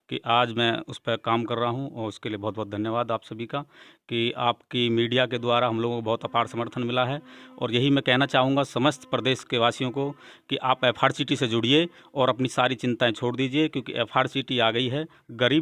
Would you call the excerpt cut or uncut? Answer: uncut